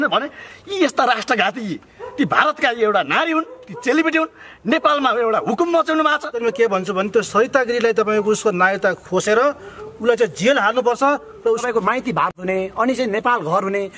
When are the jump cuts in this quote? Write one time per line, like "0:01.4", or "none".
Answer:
0:06.4
0:11.6